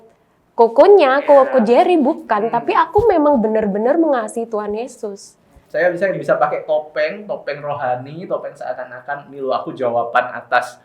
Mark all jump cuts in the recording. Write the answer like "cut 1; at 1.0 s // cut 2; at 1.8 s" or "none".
cut 1; at 5.5 s